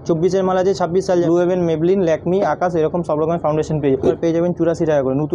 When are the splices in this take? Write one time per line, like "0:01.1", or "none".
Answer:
0:01.2
0:04.2